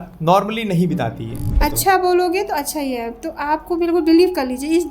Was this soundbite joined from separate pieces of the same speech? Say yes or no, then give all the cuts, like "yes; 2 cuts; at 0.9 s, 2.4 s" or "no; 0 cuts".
yes; 1 cut; at 1.6 s